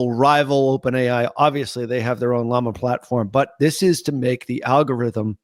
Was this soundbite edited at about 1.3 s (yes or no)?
no